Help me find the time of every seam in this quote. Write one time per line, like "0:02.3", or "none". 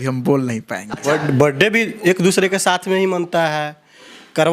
0:01.0